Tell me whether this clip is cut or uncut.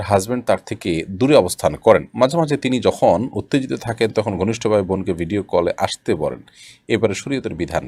uncut